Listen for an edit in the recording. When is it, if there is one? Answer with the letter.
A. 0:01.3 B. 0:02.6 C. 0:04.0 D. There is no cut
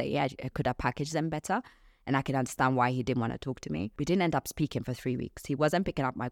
C